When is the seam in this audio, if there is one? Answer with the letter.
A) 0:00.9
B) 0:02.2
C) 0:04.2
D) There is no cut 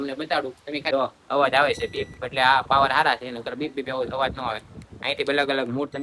A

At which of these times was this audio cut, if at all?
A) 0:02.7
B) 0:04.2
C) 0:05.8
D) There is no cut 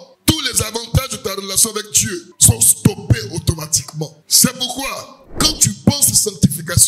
B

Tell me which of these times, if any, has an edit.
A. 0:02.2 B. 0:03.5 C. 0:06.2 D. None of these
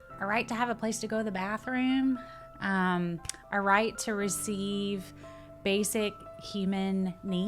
D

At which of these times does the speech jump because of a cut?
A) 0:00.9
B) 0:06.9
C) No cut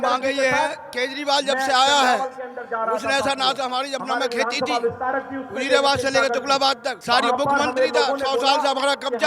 B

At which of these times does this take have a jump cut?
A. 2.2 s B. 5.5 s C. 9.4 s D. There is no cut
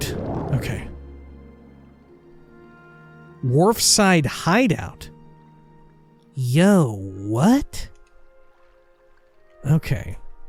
D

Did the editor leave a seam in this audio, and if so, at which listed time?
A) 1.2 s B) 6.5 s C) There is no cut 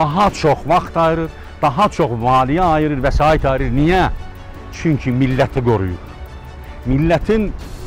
C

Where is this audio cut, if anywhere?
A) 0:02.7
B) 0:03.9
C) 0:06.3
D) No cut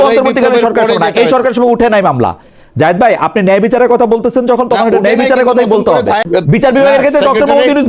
C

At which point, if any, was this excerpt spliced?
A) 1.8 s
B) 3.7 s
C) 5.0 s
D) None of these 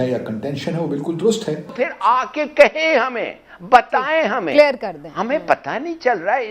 A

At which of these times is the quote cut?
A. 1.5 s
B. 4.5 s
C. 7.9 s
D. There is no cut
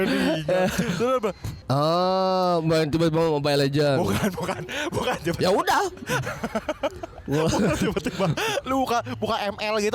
A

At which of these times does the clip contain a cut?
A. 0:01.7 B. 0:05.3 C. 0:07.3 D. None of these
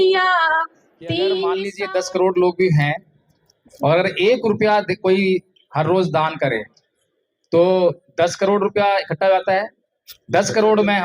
A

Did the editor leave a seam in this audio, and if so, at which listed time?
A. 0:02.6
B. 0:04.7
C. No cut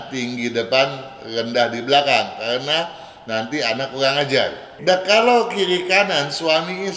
B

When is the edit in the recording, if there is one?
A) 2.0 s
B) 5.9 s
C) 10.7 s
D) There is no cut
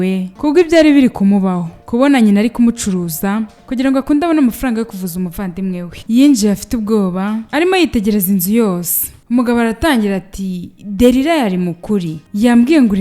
B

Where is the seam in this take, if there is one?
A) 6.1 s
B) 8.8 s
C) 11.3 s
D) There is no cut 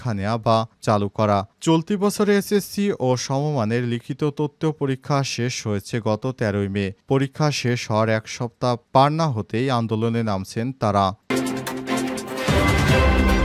C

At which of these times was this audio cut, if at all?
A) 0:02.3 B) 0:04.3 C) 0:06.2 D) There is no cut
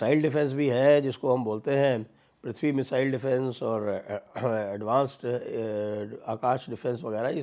D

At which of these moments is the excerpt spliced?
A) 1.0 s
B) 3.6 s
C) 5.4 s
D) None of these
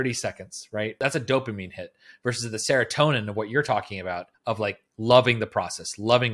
A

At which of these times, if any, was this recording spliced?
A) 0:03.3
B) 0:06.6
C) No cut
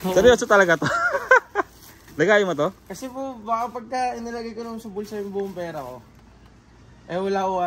C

